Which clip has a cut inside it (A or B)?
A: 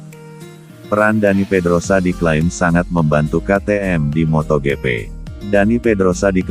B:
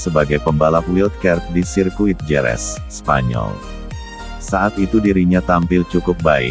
A